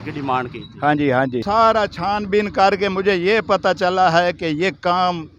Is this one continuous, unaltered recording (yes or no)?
no